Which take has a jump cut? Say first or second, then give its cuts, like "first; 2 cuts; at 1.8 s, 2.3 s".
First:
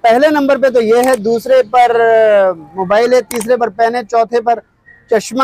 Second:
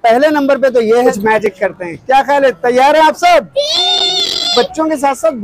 second; 2 cuts; at 1.1 s, 4.5 s